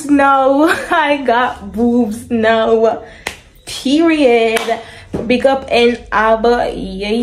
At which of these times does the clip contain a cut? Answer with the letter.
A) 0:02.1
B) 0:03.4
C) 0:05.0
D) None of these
D